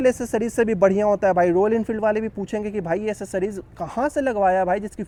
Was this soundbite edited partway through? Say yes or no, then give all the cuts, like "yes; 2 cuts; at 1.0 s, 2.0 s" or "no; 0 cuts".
no; 0 cuts